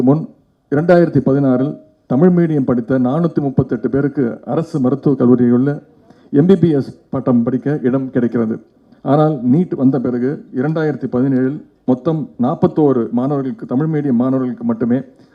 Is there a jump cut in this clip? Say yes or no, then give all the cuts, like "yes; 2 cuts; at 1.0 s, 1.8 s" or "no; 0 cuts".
no; 0 cuts